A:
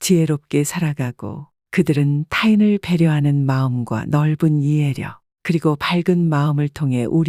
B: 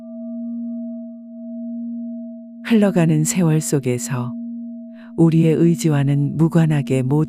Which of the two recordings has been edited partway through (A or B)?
B